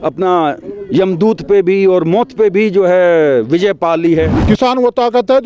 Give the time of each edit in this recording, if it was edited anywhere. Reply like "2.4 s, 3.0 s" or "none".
4.4 s